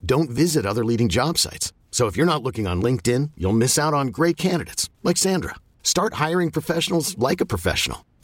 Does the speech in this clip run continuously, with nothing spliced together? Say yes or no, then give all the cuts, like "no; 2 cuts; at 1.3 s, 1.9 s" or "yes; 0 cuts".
yes; 0 cuts